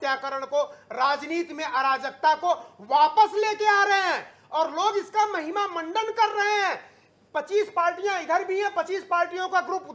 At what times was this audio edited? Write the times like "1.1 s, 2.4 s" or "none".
none